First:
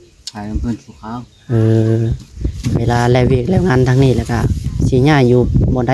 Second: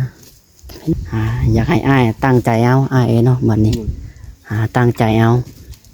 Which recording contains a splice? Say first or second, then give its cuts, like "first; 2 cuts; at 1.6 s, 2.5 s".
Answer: second; 1 cut; at 0.9 s